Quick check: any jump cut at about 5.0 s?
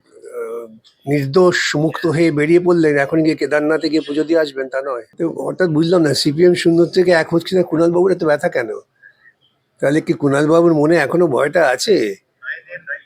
yes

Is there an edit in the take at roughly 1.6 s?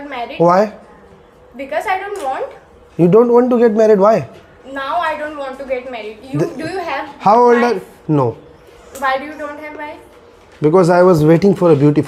no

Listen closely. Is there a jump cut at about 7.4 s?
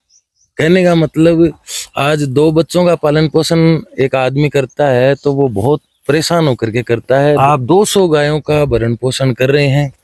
yes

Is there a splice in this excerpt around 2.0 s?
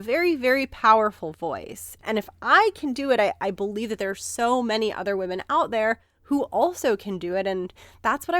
yes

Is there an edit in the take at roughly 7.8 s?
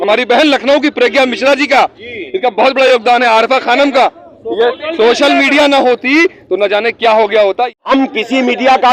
yes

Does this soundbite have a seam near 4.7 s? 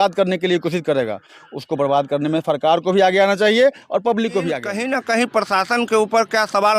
yes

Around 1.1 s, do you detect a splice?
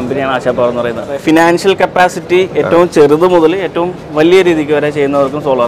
yes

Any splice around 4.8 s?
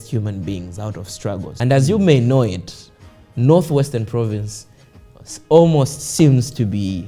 no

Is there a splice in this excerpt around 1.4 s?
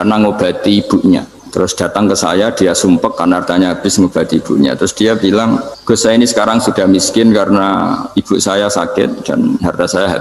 yes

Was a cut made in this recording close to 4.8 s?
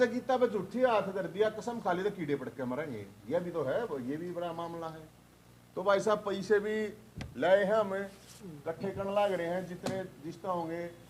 no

